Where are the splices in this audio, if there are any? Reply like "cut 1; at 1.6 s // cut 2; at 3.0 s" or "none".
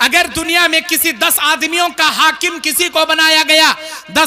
none